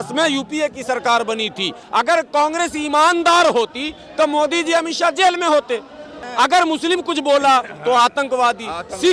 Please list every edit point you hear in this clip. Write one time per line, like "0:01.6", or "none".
0:01.8
0:06.3